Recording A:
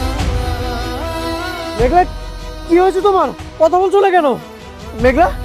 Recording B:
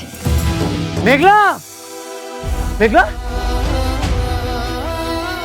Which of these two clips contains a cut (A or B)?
B